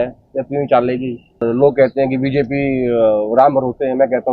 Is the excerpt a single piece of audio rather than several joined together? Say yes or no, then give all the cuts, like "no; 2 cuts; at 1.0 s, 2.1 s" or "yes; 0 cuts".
no; 1 cut; at 1.4 s